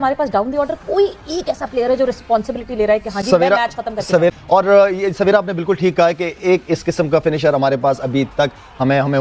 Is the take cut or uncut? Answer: uncut